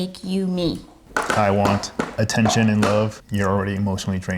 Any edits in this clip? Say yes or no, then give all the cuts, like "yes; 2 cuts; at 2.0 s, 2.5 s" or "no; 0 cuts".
yes; 2 cuts; at 1.0 s, 3.2 s